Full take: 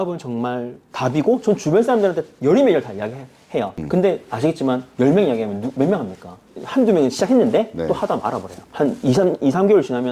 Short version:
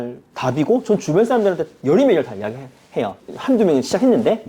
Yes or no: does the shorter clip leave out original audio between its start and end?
yes